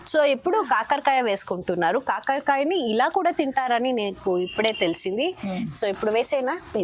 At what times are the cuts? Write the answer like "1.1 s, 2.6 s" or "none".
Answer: none